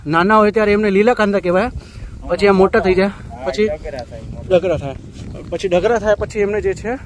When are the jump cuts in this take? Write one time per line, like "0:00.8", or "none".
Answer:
none